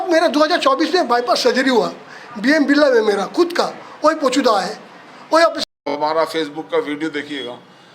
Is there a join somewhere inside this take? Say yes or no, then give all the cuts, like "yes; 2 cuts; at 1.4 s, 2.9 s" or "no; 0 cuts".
yes; 1 cut; at 5.7 s